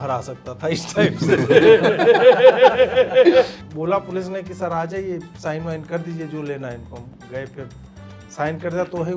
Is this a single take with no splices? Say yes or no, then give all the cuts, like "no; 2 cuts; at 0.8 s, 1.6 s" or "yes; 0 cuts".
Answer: no; 1 cut; at 3.6 s